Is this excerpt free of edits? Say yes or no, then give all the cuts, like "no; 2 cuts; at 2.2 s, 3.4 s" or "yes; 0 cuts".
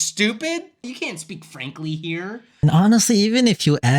no; 2 cuts; at 0.8 s, 2.6 s